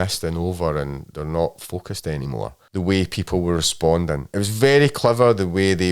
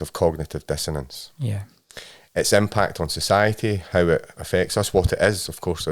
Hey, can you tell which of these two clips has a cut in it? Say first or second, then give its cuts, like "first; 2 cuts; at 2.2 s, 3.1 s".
first; 1 cut; at 2.6 s